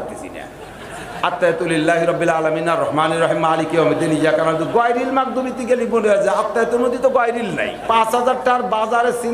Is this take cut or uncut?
cut